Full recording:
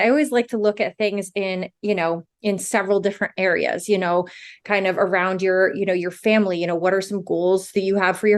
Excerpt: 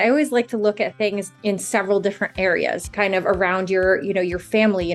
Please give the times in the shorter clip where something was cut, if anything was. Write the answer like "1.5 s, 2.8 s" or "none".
1.3 s, 2.8 s